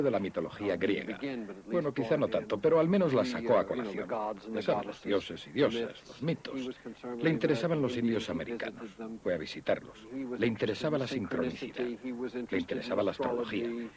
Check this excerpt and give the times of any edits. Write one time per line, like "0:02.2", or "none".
none